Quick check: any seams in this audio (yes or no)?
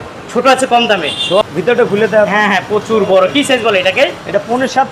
yes